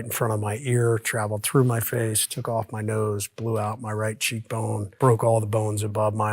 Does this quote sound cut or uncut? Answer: cut